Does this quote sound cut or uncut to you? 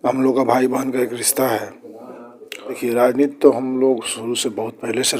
cut